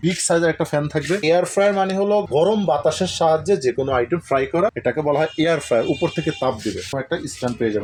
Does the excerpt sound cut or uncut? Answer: uncut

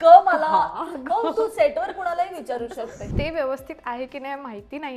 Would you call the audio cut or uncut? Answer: cut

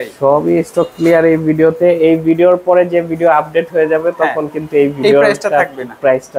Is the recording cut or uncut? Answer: uncut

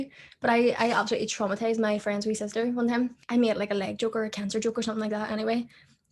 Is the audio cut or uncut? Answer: cut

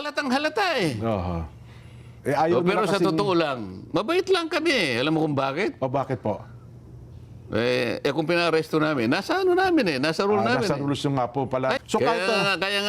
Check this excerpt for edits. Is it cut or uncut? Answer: cut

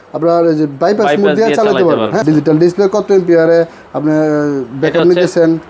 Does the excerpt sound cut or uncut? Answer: cut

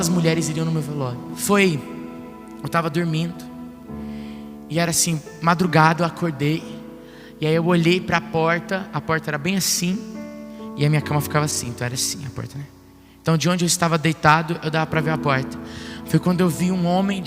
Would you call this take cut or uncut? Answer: cut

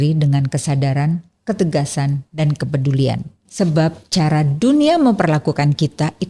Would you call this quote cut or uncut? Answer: cut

